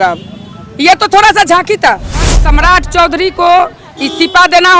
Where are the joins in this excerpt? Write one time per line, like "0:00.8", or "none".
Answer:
0:02.4